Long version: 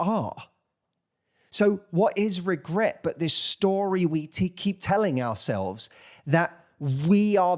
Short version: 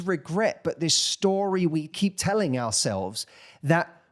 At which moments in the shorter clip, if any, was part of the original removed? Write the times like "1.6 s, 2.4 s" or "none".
1.9 s